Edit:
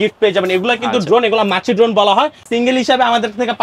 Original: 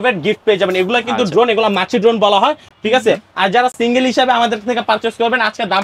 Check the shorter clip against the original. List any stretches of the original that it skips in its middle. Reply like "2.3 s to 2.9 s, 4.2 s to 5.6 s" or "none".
2.7 s to 3.8 s